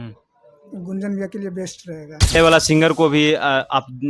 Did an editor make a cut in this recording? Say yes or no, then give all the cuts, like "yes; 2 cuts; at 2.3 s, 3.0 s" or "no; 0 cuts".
yes; 1 cut; at 2.4 s